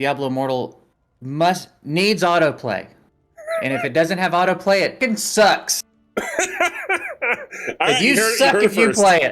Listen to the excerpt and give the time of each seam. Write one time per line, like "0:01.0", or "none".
0:05.0